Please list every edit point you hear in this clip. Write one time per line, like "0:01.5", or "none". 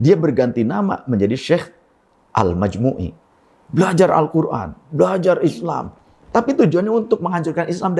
none